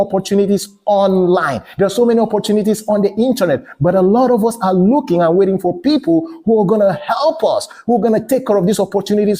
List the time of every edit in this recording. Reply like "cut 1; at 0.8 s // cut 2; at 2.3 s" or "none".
none